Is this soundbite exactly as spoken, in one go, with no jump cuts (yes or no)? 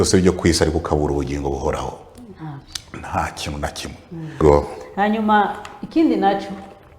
no